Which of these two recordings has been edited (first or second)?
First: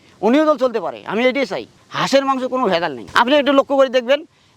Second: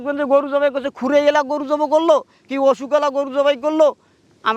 first